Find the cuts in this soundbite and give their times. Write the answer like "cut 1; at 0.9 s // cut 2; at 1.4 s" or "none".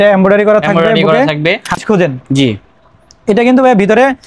cut 1; at 1.8 s